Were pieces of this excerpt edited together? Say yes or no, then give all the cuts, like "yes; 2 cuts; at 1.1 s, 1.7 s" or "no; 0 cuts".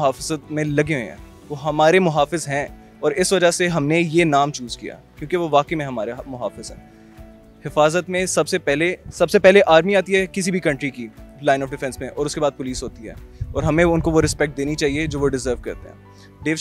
no; 0 cuts